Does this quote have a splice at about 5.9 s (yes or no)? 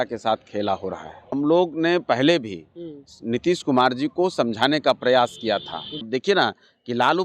yes